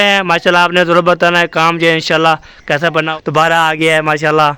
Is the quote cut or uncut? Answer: cut